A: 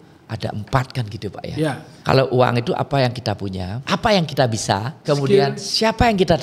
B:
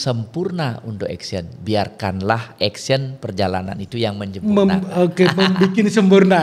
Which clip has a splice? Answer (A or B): A